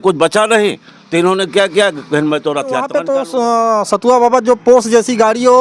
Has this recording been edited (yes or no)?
yes